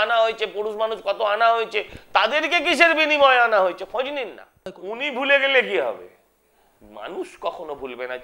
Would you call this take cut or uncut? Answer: cut